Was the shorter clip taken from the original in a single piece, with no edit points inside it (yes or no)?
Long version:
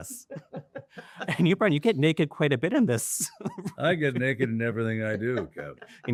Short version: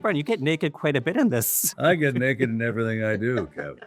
no